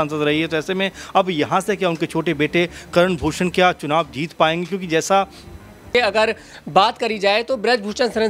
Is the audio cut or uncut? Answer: cut